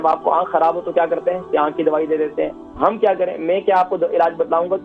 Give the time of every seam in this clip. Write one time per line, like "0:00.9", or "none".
none